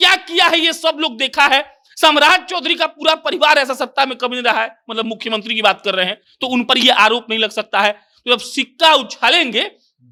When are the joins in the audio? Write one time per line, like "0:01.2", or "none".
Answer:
none